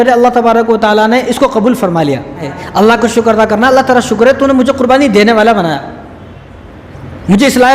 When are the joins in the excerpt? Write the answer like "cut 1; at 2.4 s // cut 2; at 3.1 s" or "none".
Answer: cut 1; at 2.6 s